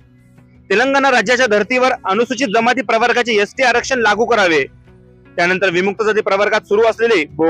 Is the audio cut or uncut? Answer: uncut